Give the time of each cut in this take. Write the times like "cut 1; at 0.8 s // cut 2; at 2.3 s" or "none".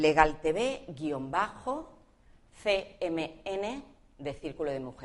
cut 1; at 2.9 s